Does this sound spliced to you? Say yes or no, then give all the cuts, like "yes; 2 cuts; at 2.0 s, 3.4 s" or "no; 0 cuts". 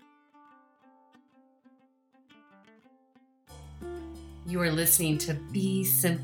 yes; 1 cut; at 4.4 s